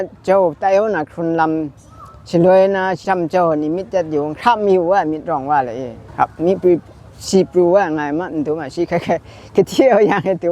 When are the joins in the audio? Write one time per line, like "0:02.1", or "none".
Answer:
0:03.0
0:06.0